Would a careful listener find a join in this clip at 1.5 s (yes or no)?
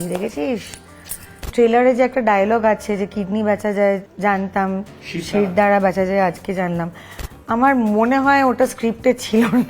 yes